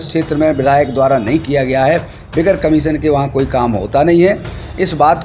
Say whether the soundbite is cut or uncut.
uncut